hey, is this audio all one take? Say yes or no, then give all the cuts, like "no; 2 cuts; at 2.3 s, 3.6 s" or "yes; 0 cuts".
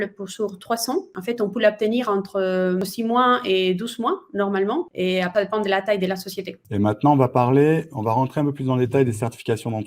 no; 4 cuts; at 1.1 s, 2.8 s, 5.2 s, 6.5 s